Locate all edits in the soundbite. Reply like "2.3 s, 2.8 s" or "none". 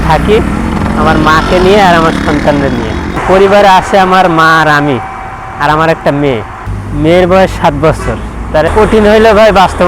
3.2 s, 6.6 s, 8.7 s